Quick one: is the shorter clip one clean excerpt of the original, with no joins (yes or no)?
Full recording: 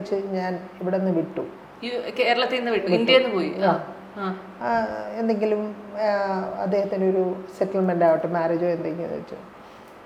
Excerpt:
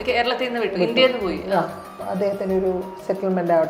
no